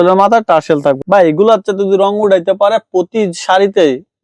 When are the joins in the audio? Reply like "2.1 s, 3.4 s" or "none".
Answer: 1.0 s